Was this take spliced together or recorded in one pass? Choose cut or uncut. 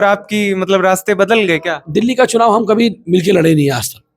uncut